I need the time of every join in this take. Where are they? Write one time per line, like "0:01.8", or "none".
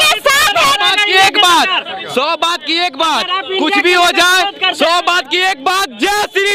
none